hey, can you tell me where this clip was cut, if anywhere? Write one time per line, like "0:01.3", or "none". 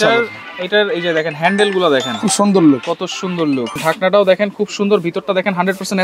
0:03.8